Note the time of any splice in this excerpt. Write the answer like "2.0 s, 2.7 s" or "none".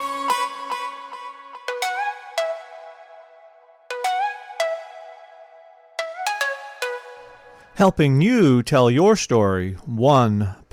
none